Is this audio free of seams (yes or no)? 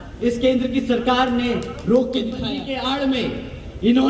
no